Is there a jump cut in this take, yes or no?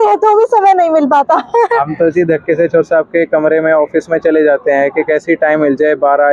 no